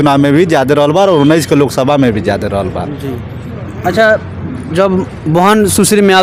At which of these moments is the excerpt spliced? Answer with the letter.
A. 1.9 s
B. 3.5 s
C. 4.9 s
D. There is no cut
D